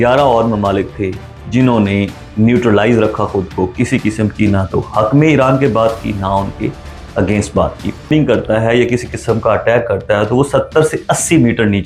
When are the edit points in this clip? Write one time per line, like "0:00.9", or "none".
0:08.1